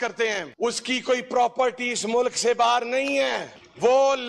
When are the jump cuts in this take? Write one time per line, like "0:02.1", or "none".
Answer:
none